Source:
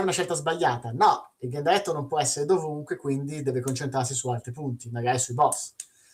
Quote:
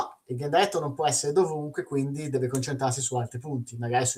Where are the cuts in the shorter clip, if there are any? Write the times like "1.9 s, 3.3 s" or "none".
none